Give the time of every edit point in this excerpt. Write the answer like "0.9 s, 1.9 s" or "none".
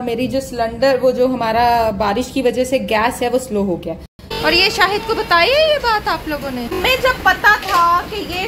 4.3 s, 6.8 s